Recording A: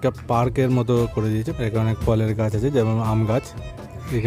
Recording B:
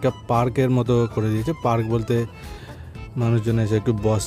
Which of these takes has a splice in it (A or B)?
A